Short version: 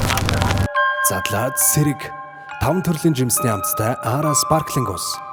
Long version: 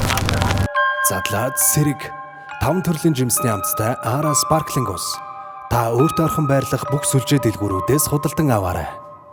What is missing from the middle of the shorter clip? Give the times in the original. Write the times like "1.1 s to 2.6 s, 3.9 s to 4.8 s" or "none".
none